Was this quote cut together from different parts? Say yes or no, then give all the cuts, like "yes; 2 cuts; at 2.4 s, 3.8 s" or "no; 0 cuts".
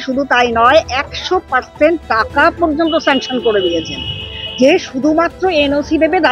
no; 0 cuts